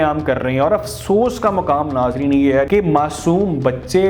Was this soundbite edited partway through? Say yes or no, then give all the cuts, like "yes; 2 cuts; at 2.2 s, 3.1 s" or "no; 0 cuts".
yes; 1 cut; at 2.7 s